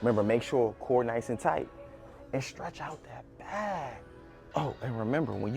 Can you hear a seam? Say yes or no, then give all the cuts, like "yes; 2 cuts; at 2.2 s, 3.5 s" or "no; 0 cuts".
yes; 1 cut; at 4.5 s